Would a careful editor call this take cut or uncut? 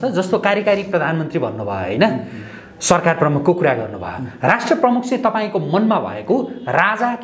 uncut